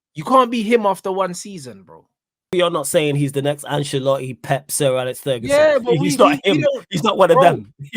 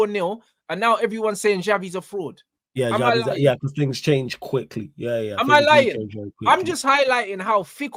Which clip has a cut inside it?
first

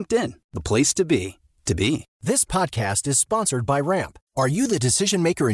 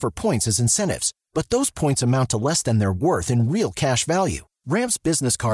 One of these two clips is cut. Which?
first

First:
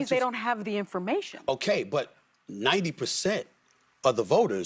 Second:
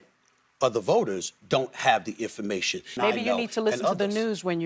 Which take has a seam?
second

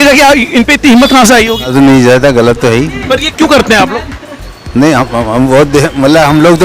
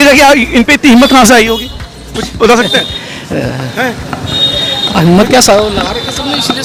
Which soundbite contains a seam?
first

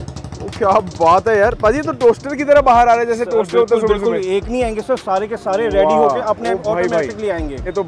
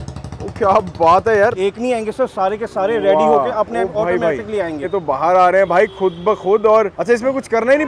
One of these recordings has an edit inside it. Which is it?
second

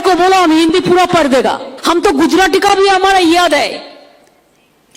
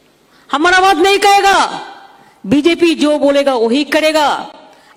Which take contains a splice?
first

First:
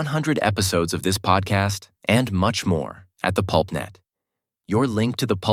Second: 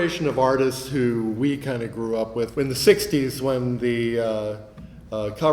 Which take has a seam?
second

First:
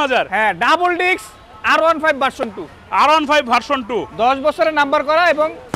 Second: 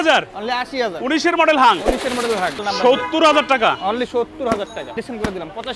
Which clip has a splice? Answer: second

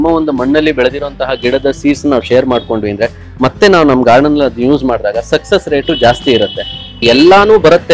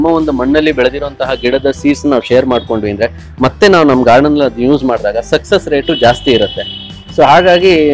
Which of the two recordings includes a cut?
first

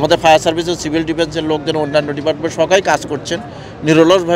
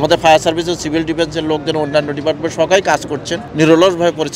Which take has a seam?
second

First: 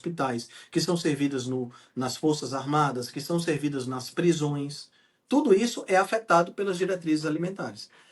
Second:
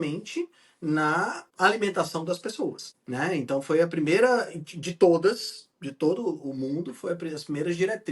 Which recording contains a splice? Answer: second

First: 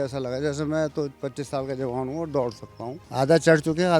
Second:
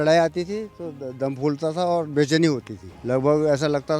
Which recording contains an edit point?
first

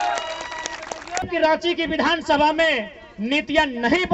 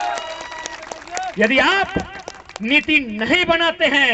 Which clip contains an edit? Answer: first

